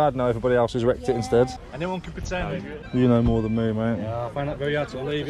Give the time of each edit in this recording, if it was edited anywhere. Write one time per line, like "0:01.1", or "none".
0:01.7
0:02.8